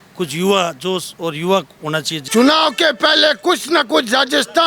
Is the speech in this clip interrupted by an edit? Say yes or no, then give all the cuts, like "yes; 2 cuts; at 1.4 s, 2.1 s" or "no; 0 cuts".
yes; 1 cut; at 2.1 s